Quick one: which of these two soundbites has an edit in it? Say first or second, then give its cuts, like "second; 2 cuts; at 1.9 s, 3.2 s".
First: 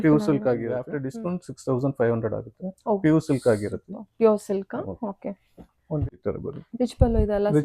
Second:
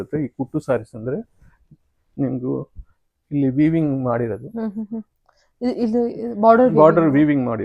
first; 2 cuts; at 1.0 s, 6.1 s